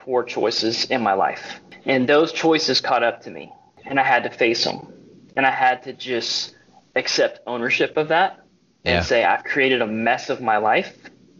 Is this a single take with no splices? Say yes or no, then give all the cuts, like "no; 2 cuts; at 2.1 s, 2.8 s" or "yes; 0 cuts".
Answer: no; 2 cuts; at 1.7 s, 3.7 s